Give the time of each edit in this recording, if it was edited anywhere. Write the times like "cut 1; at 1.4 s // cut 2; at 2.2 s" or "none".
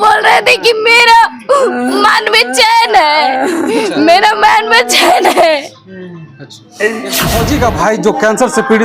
cut 1; at 7.3 s